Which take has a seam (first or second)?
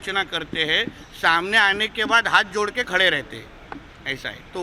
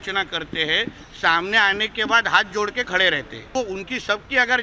second